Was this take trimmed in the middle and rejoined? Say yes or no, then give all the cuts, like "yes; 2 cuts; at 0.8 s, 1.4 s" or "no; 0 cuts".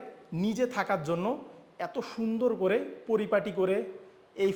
no; 0 cuts